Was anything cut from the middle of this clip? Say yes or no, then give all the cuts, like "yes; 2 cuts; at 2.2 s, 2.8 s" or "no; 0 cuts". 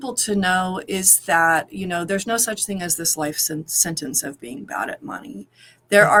no; 0 cuts